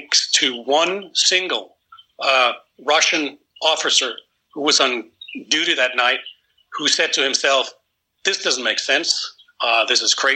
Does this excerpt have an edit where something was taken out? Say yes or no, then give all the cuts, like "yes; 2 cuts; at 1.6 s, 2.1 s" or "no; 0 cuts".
no; 0 cuts